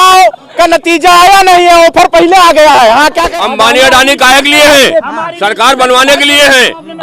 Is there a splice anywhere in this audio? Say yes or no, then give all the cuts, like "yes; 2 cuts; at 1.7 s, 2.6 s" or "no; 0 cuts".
yes; 1 cut; at 3.3 s